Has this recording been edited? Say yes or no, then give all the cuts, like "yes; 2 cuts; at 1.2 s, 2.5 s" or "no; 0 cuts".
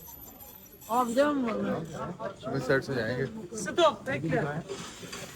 no; 0 cuts